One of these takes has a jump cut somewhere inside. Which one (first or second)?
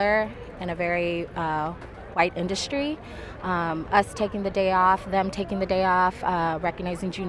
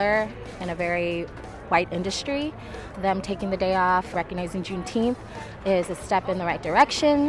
second